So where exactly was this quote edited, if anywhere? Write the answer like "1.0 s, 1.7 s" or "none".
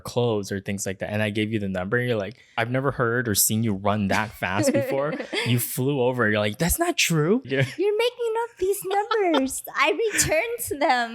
2.5 s, 7.5 s